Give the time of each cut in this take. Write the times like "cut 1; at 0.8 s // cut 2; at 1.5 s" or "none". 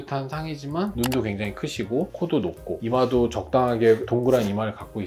cut 1; at 0.9 s